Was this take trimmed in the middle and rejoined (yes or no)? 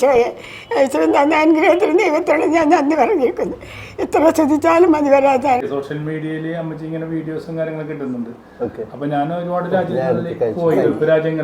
yes